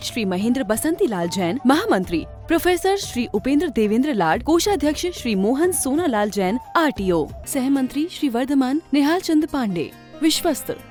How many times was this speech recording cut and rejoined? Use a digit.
0